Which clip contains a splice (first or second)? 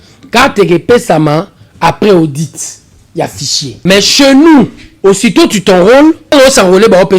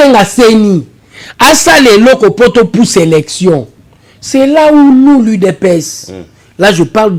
first